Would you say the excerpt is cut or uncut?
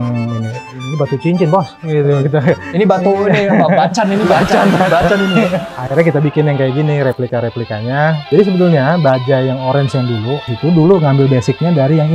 uncut